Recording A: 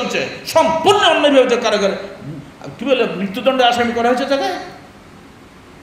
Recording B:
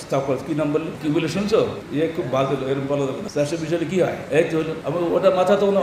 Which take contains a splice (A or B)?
B